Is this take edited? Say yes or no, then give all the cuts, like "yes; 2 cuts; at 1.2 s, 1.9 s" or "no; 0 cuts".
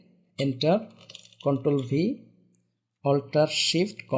no; 0 cuts